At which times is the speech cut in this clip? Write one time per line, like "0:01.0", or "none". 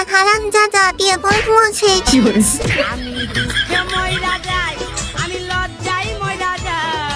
none

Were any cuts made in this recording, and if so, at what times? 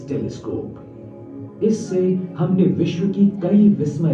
none

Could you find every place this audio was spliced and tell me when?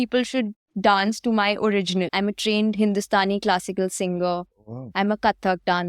0:02.1

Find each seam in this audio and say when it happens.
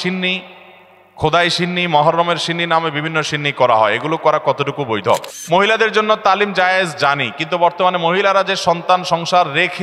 0:05.3

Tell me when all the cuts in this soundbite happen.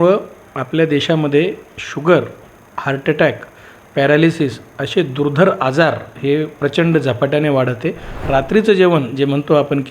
0:08.1

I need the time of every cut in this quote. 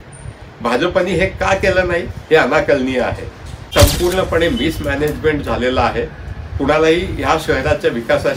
0:03.7

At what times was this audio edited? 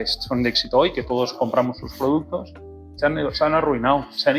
none

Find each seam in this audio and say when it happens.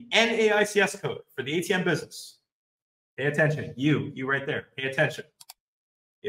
none

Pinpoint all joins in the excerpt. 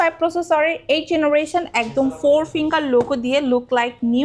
none

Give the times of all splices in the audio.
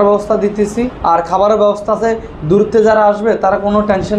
0:00.9

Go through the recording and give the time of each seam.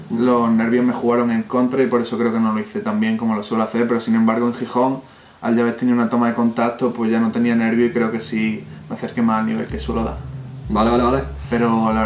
none

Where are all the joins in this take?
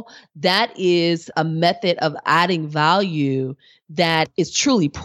0:01.3
0:02.2
0:04.3

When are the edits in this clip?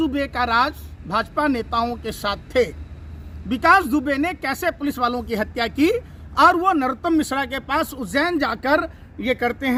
none

